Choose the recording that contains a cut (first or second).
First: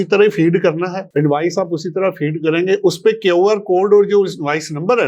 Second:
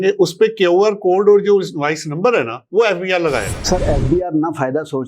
second